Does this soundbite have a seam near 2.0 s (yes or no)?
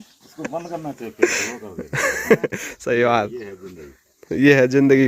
no